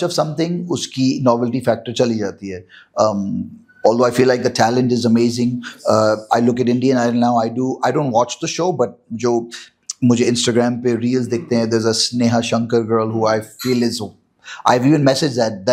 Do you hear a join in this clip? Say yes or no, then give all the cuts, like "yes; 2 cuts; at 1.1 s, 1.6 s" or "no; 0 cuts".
no; 0 cuts